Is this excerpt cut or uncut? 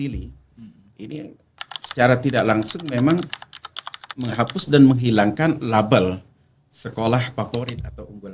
uncut